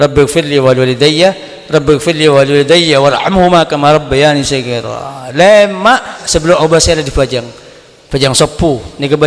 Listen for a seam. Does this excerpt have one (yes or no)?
yes